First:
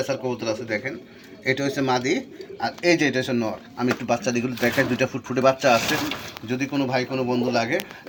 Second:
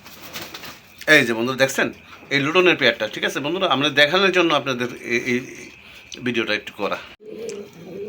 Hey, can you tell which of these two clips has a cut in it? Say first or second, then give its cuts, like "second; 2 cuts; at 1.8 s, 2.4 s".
second; 1 cut; at 7.2 s